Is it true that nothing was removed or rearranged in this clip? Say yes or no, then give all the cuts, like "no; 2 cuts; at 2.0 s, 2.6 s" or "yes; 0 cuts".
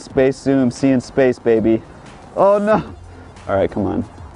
yes; 0 cuts